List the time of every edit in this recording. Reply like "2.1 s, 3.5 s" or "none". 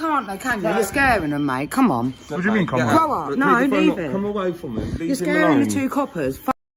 none

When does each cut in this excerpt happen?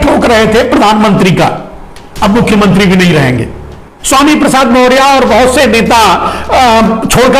3.9 s

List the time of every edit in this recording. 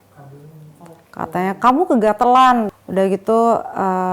2.8 s

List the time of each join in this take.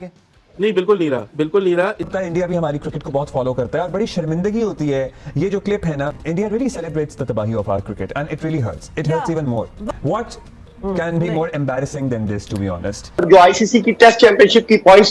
2.0 s, 13.1 s

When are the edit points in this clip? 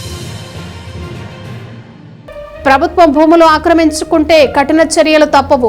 2.1 s

